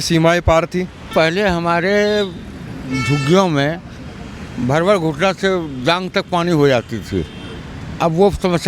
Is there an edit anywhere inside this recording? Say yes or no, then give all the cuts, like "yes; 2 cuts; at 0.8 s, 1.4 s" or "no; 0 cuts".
yes; 1 cut; at 1.0 s